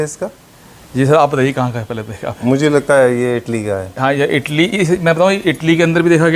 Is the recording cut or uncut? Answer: uncut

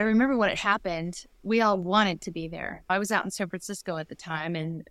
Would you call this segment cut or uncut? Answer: cut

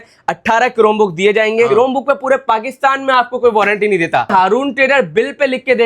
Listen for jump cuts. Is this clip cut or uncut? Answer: cut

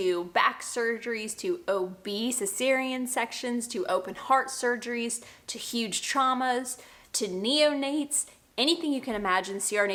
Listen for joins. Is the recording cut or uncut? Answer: uncut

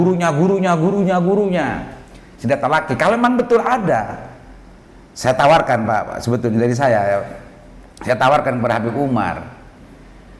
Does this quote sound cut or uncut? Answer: uncut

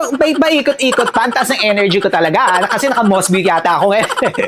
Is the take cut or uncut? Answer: uncut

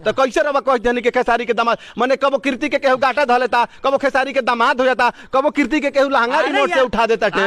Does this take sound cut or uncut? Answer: uncut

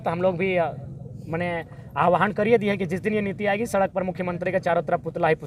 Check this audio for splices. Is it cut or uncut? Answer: uncut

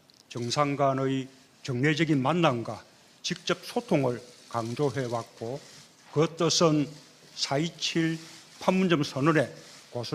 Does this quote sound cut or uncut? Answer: uncut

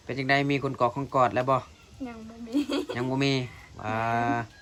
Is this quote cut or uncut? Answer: uncut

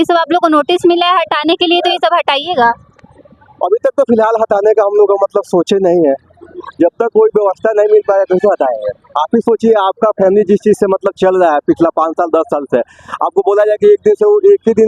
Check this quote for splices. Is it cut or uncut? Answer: uncut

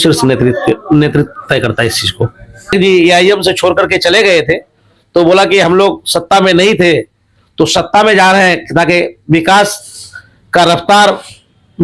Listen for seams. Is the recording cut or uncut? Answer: cut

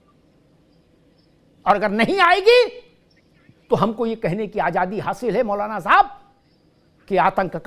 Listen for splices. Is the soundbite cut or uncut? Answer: uncut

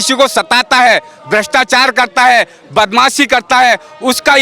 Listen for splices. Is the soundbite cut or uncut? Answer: uncut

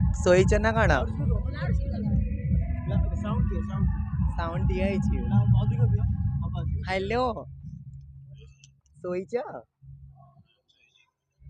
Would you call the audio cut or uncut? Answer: uncut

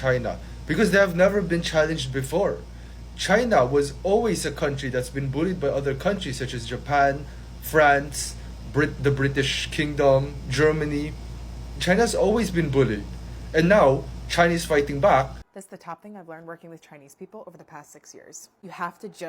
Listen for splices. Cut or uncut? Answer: cut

